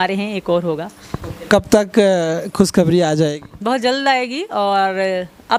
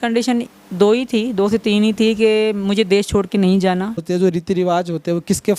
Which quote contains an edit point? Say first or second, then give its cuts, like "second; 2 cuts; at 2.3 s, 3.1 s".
second; 1 cut; at 4.0 s